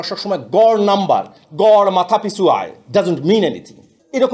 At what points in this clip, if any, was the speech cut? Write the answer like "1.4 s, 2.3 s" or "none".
none